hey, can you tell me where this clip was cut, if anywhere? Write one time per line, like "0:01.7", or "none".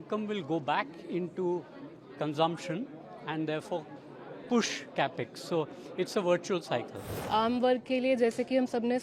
0:07.2